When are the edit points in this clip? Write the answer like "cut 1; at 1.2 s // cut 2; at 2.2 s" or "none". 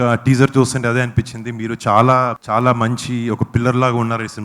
cut 1; at 2.4 s